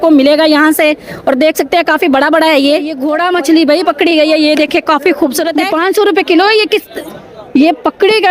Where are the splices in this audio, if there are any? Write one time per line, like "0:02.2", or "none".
0:03.0
0:05.6